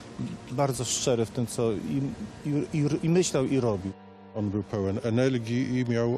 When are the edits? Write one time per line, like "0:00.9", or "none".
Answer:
0:04.2

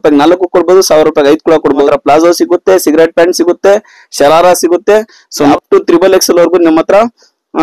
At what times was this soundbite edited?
0:01.9
0:05.5

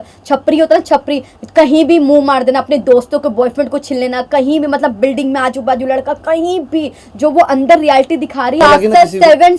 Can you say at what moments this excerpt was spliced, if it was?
0:08.6

